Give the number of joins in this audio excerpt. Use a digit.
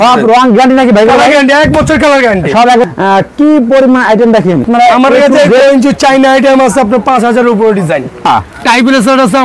3